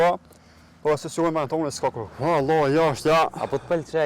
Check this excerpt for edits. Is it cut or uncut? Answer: cut